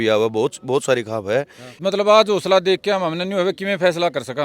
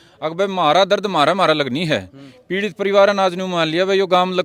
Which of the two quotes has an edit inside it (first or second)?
first